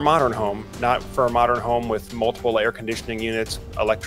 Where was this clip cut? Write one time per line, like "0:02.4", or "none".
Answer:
none